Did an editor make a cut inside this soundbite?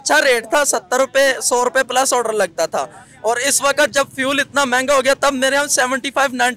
no; 0 cuts

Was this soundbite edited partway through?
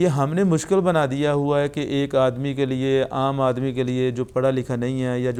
no; 0 cuts

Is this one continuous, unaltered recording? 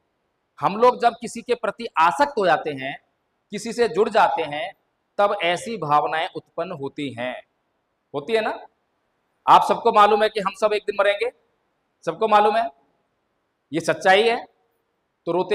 yes; 0 cuts

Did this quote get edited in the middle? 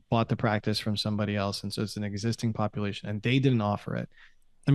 no; 0 cuts

